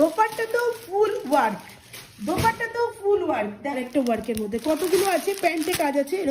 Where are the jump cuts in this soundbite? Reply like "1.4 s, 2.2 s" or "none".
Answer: 3.8 s